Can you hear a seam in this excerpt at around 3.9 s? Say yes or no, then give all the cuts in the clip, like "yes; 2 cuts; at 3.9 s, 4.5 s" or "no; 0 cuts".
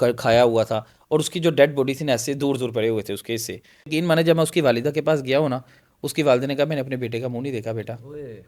yes; 1 cut; at 3.9 s